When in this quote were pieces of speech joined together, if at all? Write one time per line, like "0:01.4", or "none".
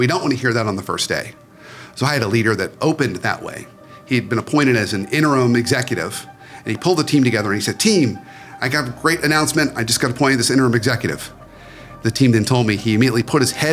none